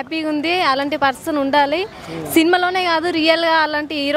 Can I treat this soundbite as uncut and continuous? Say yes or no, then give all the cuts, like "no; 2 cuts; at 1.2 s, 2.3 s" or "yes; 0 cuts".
yes; 0 cuts